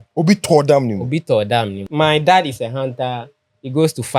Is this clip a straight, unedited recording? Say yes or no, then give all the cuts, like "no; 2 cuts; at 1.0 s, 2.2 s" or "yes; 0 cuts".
no; 1 cut; at 1.9 s